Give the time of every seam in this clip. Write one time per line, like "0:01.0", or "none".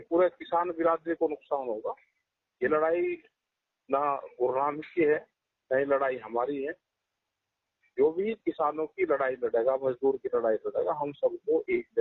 none